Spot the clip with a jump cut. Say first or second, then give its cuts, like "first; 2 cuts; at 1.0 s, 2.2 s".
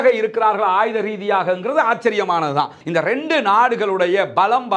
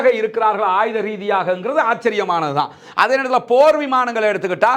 first; 1 cut; at 2.8 s